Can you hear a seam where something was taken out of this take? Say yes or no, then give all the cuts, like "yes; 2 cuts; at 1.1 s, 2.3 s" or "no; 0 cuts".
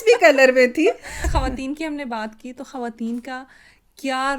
yes; 1 cut; at 1.2 s